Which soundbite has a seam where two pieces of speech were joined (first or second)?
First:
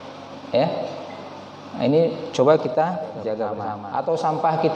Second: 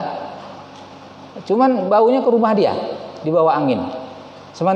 first